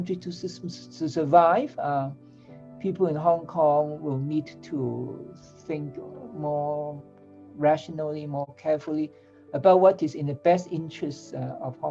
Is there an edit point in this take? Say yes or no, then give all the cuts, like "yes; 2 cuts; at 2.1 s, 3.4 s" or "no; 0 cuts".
no; 0 cuts